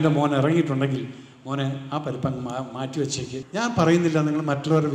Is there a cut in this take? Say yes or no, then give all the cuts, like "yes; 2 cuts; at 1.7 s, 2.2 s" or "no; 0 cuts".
yes; 1 cut; at 3.4 s